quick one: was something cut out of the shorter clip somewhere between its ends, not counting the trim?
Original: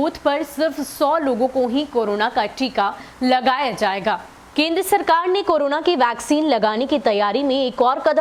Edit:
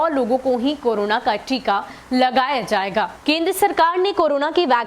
yes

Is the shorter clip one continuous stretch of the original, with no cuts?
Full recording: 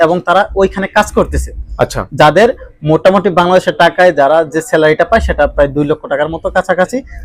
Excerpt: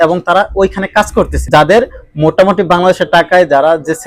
no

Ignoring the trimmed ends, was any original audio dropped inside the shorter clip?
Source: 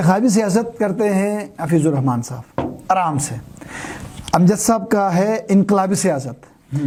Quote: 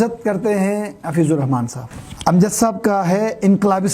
yes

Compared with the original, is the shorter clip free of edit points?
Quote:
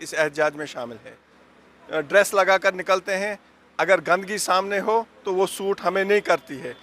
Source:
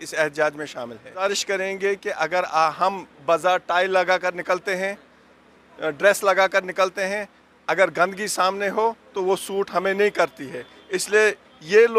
no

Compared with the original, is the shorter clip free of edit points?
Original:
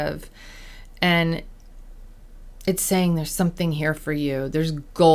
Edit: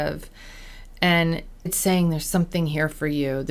no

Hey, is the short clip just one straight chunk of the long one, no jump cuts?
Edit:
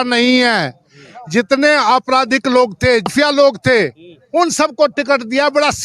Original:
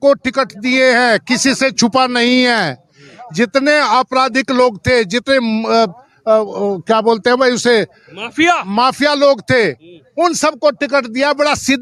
no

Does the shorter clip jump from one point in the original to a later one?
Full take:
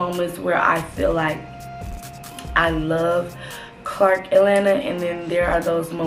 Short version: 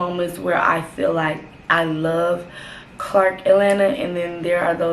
yes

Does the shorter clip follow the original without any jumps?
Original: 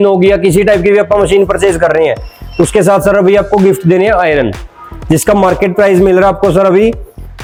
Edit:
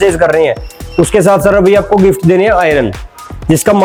yes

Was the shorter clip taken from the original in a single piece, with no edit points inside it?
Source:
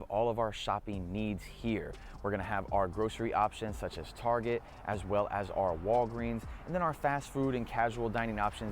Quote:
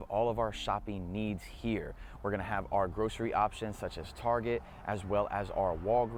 yes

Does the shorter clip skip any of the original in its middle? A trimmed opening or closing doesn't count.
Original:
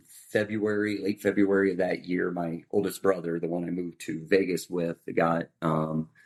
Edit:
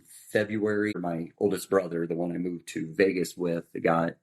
yes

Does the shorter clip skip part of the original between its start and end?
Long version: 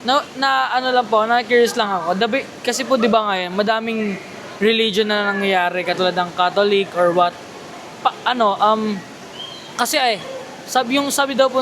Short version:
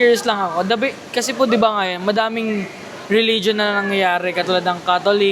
no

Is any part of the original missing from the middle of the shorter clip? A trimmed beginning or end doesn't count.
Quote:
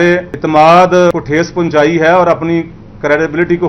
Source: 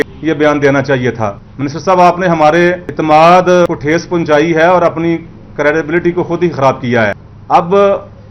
no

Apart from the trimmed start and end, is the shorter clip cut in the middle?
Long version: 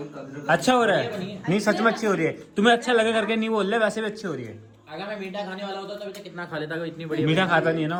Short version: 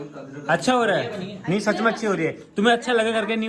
no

